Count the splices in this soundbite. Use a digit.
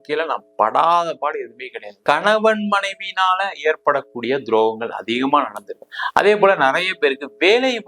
2